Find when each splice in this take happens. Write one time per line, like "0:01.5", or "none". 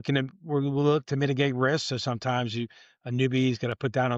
none

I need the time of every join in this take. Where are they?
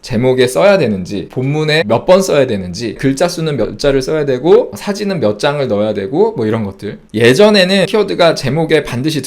0:01.7
0:03.0
0:07.1
0:07.9

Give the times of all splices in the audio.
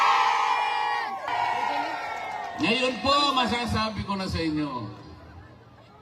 0:01.3

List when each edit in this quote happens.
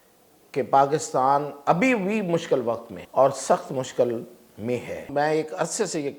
0:02.9
0:05.1

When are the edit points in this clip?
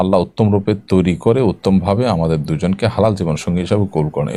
none

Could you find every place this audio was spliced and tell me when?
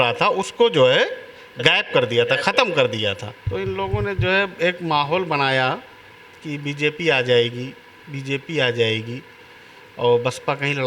0:03.3

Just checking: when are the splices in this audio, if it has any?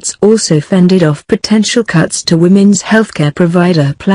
none

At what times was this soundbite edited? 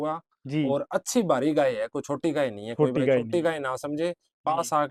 none

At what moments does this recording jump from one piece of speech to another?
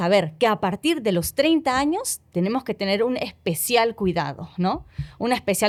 none

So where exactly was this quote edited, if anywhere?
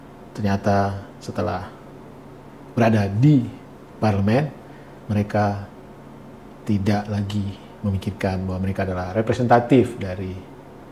none

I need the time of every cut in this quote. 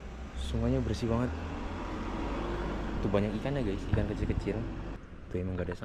none

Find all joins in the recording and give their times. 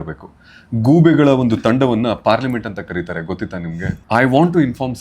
0:04.0

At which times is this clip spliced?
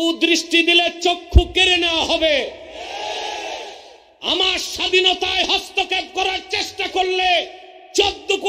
none

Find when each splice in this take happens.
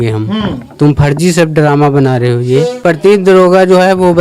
0:02.8

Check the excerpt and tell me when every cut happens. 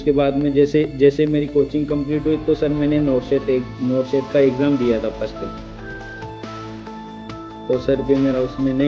none

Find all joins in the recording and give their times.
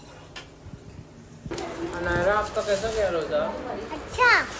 0:01.5

